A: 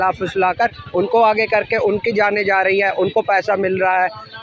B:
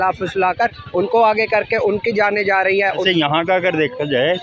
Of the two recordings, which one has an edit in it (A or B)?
B